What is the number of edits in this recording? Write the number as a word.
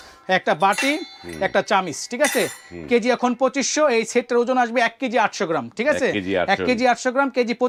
zero